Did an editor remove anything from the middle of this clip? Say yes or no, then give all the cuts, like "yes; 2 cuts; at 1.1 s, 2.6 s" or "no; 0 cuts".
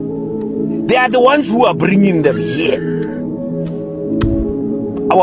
no; 0 cuts